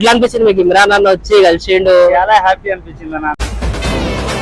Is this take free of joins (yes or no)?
yes